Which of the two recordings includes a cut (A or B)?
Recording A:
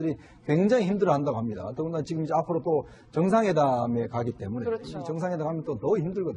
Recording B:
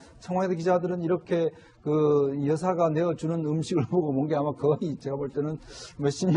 B